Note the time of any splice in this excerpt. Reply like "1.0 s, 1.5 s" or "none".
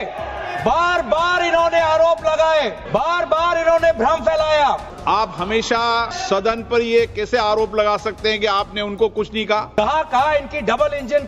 2.8 s, 4.9 s, 6.1 s, 9.7 s